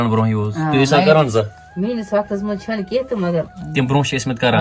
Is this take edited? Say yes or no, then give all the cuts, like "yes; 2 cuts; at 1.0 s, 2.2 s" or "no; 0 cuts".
yes; 2 cuts; at 1.6 s, 3.6 s